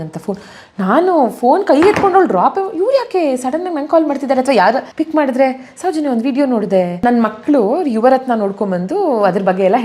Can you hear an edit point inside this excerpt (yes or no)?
yes